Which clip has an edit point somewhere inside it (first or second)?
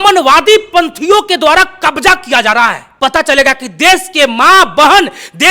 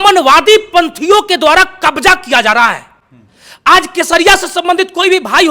first